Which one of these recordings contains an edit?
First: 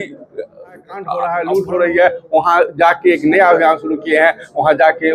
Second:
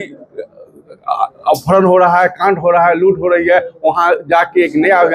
first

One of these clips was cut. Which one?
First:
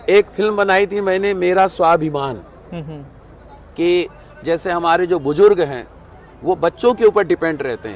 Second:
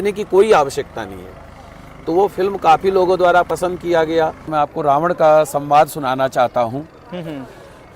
second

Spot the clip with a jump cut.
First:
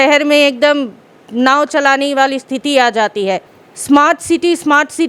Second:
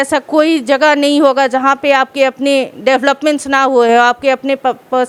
first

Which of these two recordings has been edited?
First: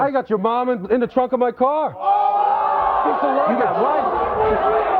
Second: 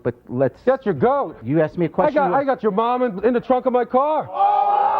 second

